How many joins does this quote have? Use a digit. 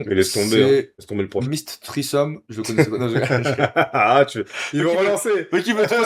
1